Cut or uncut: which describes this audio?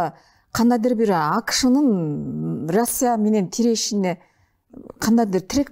uncut